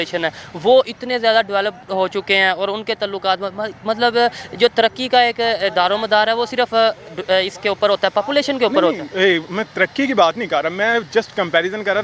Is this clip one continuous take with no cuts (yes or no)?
yes